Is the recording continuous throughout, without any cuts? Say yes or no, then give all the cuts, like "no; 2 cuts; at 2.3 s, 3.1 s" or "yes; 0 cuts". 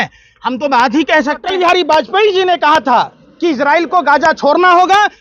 no; 1 cut; at 1.5 s